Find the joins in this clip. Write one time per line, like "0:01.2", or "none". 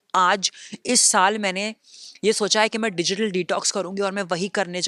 none